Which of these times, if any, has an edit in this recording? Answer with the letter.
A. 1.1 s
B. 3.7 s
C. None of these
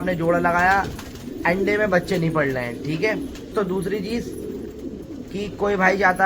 B